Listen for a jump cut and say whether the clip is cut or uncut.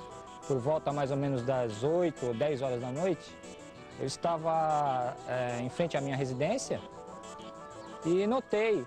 cut